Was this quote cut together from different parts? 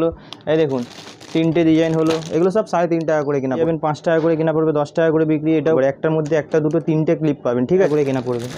yes; 3 cuts; at 3.6 s, 5.8 s, 7.9 s

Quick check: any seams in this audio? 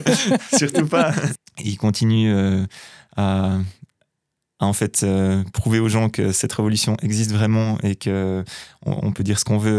yes; 1 cut; at 1.3 s

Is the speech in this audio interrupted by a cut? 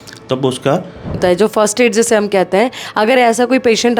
yes; 1 cut; at 1.2 s

